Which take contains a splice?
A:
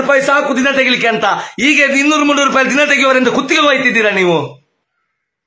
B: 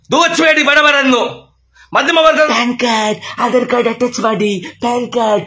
B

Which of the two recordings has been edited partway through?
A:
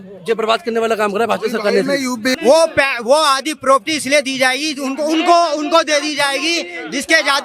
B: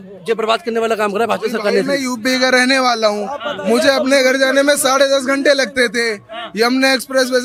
A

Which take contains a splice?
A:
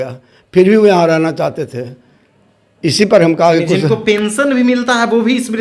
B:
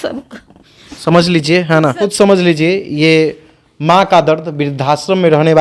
B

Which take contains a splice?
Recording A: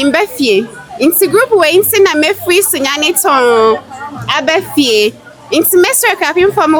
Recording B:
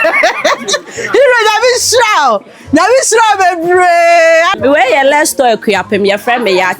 B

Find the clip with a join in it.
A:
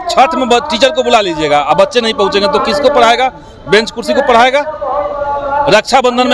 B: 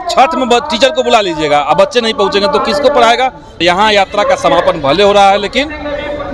B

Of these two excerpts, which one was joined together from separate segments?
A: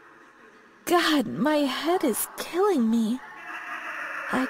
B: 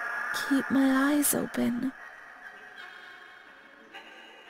B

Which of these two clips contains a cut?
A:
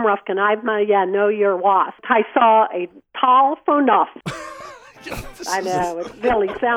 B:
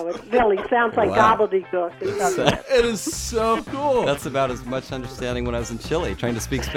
A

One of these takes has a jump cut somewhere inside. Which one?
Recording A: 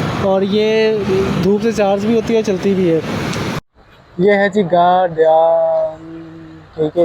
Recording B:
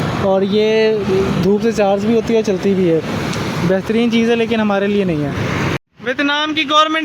A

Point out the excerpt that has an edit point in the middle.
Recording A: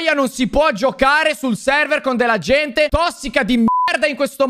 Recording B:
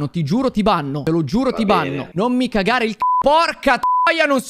B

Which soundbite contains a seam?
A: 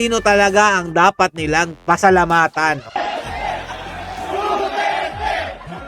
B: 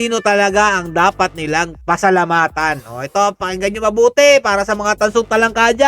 A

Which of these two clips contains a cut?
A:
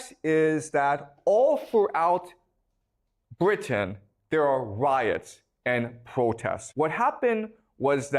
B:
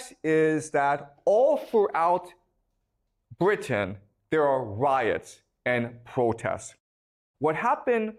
A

